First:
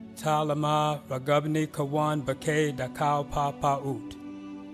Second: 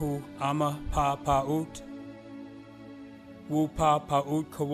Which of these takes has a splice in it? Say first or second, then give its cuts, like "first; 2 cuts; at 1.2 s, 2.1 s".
first; 1 cut; at 3.8 s